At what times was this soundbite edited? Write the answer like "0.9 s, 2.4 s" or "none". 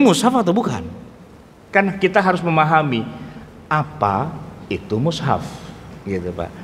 none